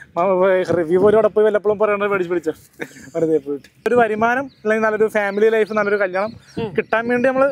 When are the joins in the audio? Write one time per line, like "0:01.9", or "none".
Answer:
0:03.8